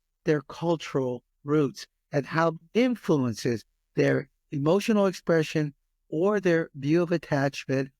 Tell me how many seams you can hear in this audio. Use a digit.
1